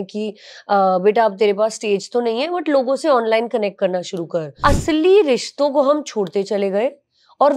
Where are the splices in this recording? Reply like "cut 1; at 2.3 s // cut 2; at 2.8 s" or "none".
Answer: cut 1; at 4.6 s